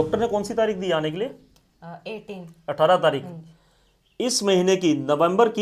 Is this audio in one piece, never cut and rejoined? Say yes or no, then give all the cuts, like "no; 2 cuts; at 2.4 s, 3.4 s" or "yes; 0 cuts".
yes; 0 cuts